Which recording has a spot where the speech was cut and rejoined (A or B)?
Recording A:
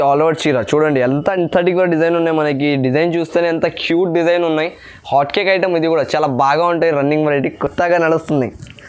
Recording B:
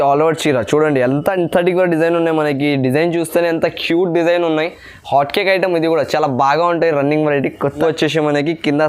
B